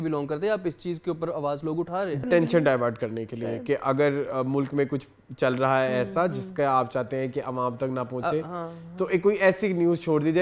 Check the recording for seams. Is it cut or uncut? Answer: cut